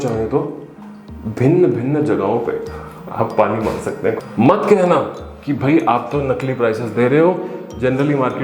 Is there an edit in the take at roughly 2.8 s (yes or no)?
no